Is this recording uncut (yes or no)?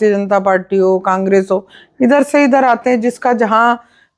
yes